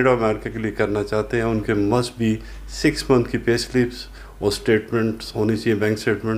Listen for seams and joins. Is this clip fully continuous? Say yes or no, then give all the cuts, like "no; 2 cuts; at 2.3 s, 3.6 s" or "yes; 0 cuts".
yes; 0 cuts